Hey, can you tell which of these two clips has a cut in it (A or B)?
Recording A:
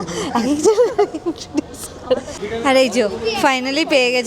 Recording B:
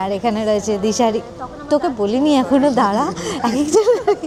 A